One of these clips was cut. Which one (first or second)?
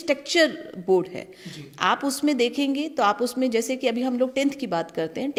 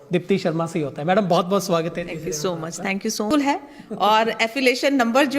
second